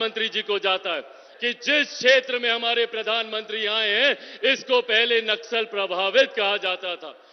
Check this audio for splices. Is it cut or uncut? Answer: cut